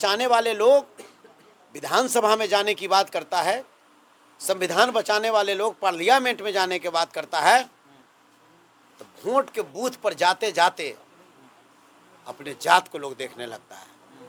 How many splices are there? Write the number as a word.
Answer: zero